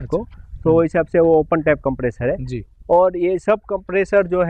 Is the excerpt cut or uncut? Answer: uncut